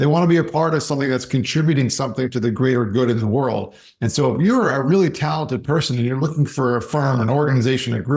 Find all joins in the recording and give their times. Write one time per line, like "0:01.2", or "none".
none

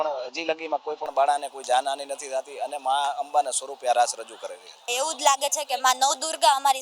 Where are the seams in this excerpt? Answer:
0:04.9

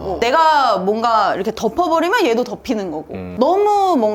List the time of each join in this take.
0:03.2

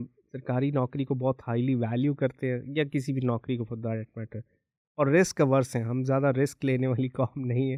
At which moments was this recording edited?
none

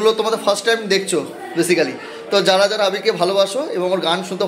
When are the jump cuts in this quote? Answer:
none

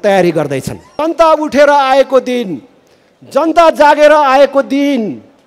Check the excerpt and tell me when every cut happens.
0:01.0

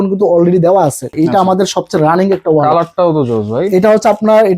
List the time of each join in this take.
0:01.1

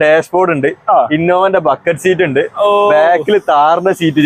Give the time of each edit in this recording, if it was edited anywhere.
none

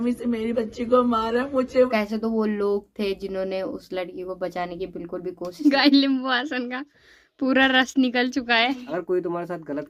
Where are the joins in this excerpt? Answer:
0:01.9
0:05.6
0:08.9

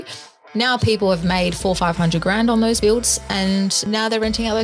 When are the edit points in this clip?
0:02.8
0:03.8

